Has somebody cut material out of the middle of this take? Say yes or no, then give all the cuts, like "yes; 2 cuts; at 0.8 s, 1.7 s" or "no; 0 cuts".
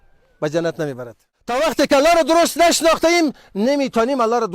yes; 1 cut; at 1.5 s